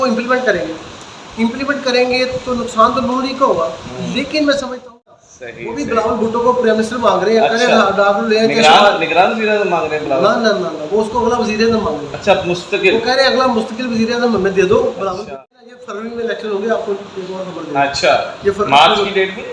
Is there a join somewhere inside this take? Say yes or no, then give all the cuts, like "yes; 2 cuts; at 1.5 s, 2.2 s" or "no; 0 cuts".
yes; 2 cuts; at 5.0 s, 15.2 s